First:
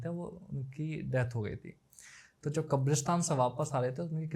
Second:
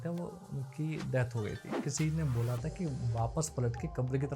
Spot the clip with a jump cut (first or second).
second